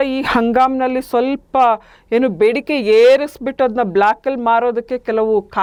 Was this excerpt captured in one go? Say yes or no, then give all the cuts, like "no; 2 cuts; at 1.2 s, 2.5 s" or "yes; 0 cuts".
yes; 0 cuts